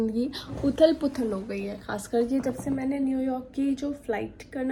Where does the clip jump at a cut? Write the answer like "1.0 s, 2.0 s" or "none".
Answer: none